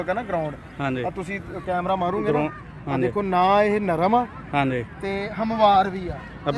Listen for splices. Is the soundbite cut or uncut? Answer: uncut